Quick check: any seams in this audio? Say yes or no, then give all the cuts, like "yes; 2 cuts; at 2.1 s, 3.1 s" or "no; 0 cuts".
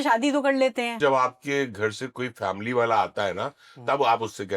yes; 1 cut; at 1.0 s